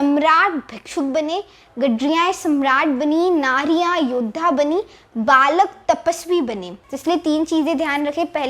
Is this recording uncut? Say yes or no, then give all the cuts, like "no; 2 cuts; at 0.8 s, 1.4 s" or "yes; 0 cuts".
yes; 0 cuts